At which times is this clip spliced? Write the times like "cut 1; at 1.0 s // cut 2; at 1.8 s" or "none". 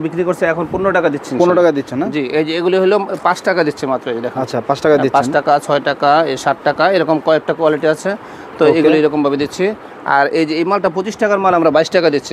none